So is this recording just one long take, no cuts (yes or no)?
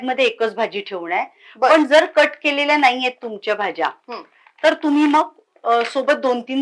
yes